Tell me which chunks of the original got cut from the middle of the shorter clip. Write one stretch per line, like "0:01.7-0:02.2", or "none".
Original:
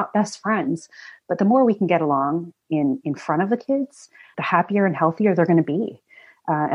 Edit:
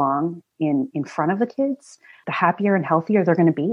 none